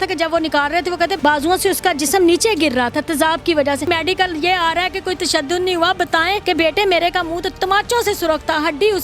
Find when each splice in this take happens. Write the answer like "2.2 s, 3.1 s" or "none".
1.1 s, 3.9 s, 6.4 s